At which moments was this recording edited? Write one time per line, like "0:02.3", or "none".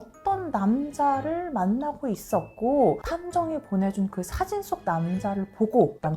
0:03.0